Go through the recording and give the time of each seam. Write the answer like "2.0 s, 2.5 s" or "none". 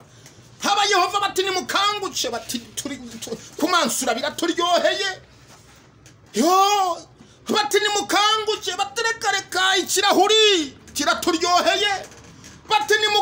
none